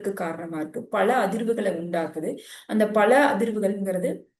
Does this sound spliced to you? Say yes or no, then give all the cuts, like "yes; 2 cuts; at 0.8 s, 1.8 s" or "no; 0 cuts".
no; 0 cuts